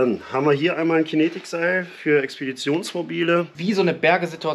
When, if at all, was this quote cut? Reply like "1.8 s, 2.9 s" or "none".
3.5 s